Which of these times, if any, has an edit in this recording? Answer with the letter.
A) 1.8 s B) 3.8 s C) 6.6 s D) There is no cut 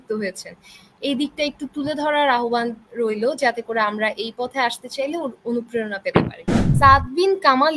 C